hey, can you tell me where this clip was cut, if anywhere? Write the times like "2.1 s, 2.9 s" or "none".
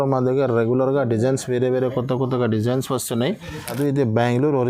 3.8 s